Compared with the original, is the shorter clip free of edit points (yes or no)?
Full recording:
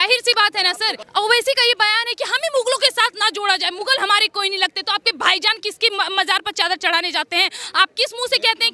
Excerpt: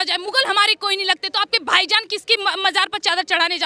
yes